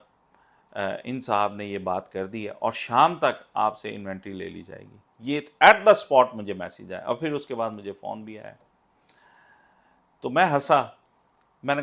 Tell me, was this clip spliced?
no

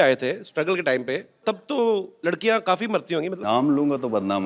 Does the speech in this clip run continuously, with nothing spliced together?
no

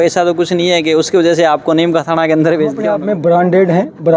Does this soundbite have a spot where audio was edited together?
yes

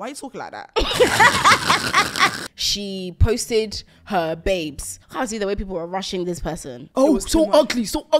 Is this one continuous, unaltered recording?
no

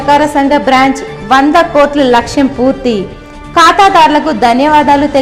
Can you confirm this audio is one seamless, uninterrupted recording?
yes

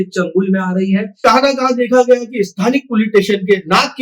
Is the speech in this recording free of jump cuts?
no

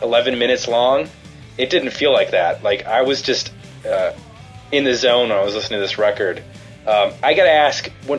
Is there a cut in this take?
no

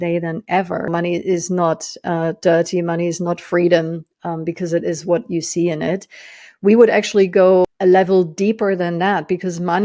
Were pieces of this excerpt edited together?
yes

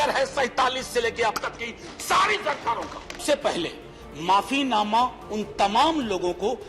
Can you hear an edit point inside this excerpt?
yes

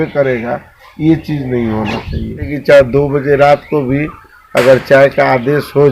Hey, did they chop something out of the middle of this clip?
yes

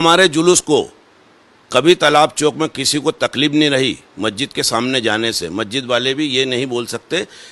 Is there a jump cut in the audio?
no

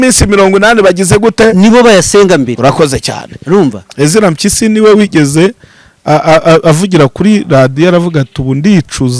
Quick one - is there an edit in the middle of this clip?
yes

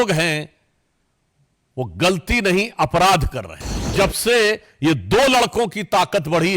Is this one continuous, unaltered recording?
no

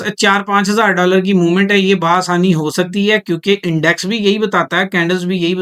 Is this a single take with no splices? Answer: yes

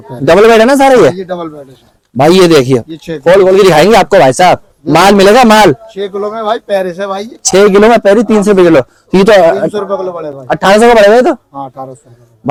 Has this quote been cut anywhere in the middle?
no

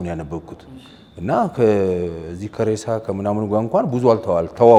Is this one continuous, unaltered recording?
yes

